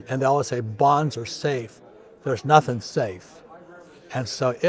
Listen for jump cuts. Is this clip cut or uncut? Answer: uncut